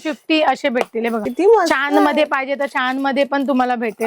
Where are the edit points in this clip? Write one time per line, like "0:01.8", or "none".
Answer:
0:01.2